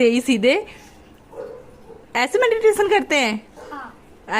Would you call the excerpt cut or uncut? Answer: uncut